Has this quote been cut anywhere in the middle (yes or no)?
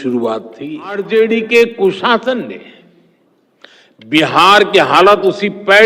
yes